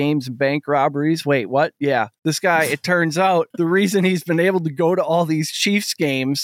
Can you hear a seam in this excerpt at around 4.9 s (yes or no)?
no